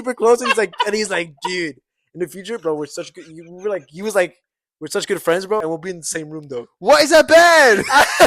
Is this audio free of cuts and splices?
no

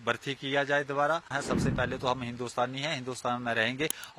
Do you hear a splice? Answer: yes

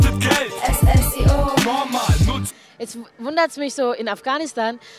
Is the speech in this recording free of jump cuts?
yes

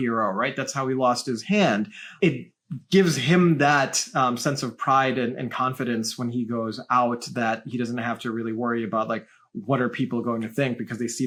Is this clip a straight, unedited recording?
yes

